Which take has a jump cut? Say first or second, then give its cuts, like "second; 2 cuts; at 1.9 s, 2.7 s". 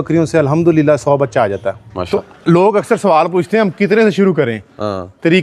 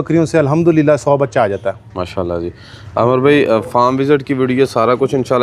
first; 1 cut; at 1.9 s